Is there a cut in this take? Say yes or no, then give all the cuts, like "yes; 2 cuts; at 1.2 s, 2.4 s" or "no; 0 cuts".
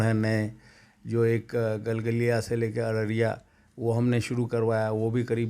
no; 0 cuts